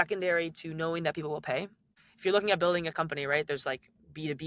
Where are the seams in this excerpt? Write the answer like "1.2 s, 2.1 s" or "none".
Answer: 1.9 s